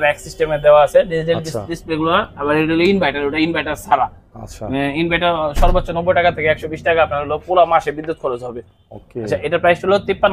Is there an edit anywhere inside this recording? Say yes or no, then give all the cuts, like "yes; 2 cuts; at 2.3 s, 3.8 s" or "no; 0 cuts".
no; 0 cuts